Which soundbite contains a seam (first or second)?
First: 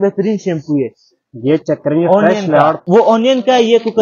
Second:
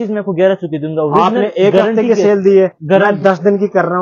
first